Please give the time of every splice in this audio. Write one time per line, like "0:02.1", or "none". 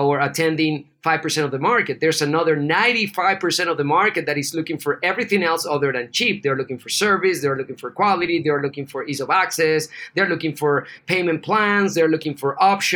0:11.0

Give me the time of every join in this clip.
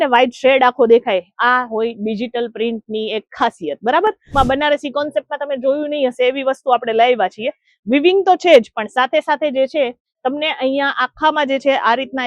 0:04.3

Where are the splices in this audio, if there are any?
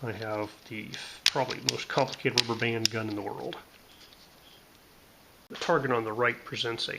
0:05.5

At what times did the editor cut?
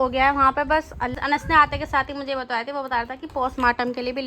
0:01.1

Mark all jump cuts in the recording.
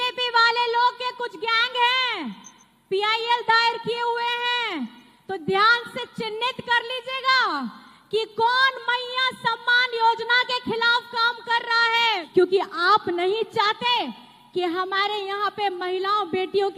0:12.2

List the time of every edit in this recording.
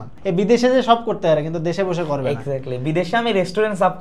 none

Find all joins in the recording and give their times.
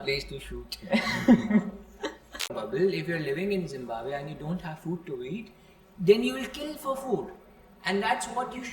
0:02.5

